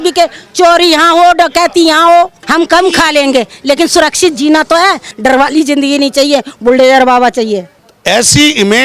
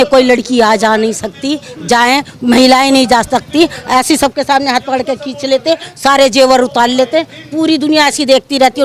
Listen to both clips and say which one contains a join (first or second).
first